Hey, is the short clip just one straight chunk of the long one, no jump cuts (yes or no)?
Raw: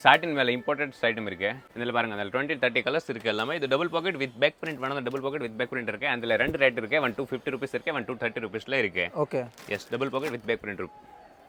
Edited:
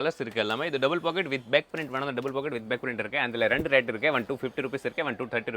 yes